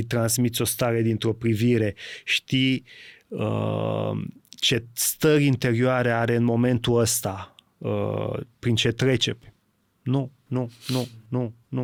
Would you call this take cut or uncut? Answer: uncut